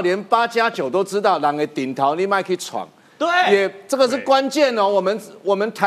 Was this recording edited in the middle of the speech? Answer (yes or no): no